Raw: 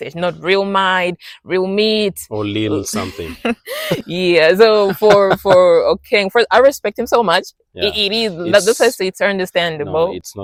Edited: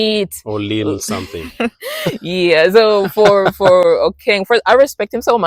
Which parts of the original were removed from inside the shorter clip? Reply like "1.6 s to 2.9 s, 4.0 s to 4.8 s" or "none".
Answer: none